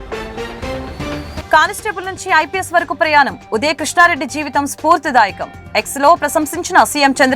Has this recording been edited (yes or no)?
yes